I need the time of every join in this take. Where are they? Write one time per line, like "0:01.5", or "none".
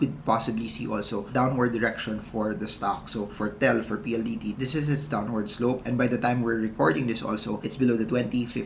none